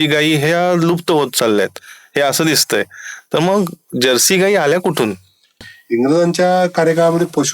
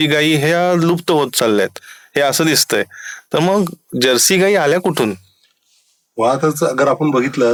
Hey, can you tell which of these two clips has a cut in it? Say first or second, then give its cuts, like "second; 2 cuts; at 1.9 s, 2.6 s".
first; 1 cut; at 5.7 s